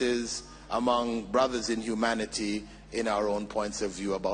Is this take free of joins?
yes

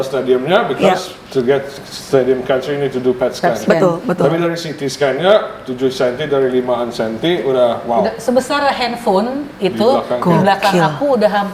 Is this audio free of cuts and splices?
yes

